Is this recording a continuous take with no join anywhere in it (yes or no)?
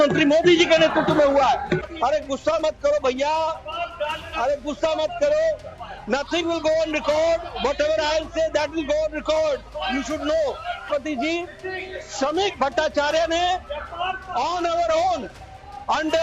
no